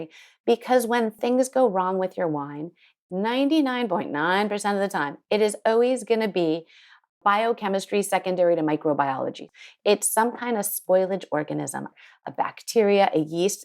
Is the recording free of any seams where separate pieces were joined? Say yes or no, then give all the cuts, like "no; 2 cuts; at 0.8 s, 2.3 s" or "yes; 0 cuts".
no; 4 cuts; at 1.2 s, 2.9 s, 9.4 s, 12.0 s